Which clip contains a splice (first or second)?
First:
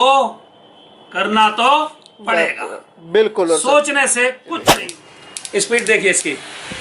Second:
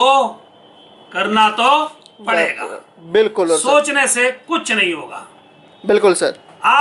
first